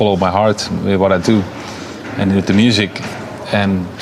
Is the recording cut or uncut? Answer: uncut